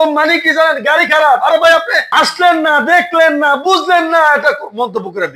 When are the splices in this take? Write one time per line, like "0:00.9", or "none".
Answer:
none